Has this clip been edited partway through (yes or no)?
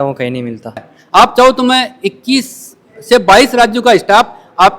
yes